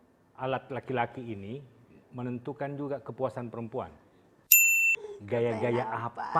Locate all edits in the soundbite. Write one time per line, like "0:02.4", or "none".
0:04.7